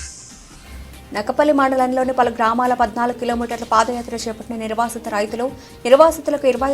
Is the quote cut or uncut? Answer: cut